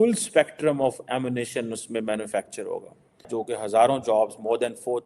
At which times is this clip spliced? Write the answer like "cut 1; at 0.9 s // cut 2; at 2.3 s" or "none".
cut 1; at 3.3 s

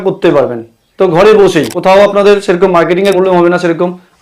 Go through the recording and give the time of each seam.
cut 1; at 1.7 s // cut 2; at 3.1 s

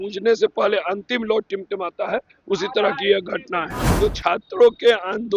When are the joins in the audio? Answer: cut 1; at 3.8 s

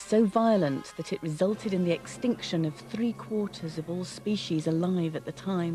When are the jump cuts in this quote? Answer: cut 1; at 4.4 s

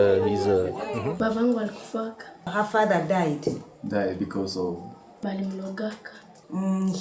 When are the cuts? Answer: cut 1; at 1.2 s // cut 2; at 5.1 s

